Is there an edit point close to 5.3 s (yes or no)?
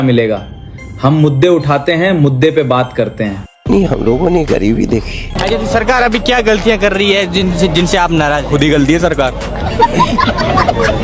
yes